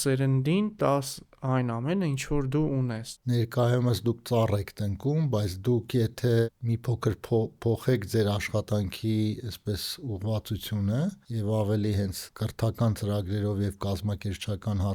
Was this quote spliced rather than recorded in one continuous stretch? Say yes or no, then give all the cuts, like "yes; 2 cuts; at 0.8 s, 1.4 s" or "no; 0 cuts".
yes; 3 cuts; at 3.1 s, 11.3 s, 12.2 s